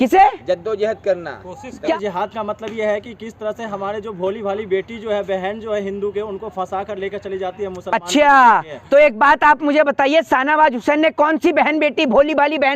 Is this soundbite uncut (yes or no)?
no